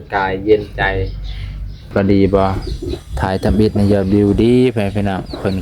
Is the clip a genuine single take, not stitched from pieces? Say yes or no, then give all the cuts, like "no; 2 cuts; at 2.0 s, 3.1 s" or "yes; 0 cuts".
no; 1 cut; at 1.9 s